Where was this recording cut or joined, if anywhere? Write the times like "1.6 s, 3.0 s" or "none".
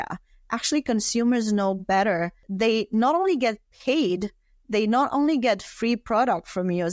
2.4 s